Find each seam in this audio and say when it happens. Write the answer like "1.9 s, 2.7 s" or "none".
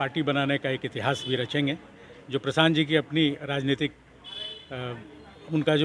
none